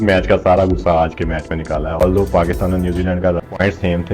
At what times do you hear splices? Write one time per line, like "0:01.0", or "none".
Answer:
0:02.0